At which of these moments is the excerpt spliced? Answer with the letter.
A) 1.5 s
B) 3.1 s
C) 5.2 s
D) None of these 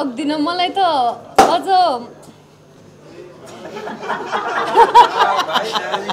D